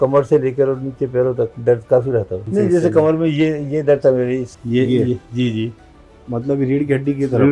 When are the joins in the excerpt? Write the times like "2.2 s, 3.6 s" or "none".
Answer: 1.5 s, 2.4 s, 4.5 s